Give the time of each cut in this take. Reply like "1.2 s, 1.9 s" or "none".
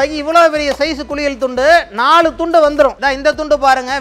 3.0 s